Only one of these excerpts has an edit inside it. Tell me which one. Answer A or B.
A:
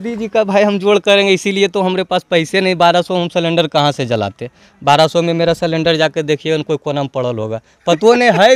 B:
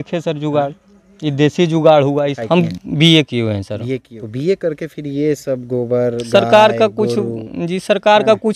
B